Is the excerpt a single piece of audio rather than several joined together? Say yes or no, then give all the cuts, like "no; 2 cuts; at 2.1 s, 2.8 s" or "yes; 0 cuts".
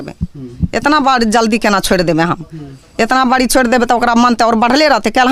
yes; 0 cuts